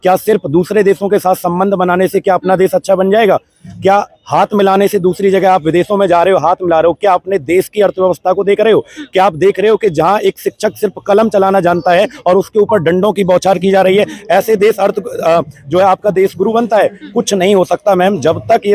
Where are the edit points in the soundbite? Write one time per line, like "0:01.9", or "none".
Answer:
none